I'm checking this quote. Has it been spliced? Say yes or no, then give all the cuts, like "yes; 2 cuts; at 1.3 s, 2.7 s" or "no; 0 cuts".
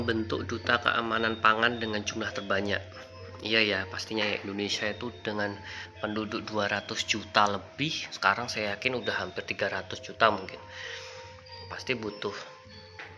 no; 0 cuts